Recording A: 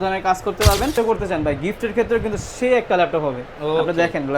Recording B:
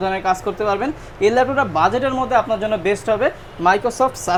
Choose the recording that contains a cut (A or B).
A